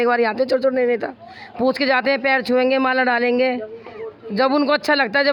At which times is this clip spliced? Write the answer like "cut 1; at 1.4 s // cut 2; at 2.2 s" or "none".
none